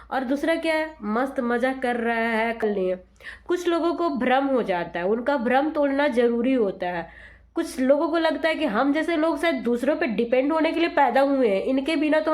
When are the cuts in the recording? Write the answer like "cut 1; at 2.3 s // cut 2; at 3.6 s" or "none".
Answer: cut 1; at 2.6 s